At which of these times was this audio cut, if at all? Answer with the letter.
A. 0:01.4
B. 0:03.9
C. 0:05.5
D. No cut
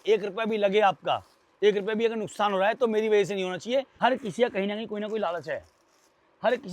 B